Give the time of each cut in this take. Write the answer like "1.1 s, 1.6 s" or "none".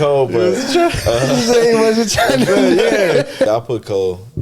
3.5 s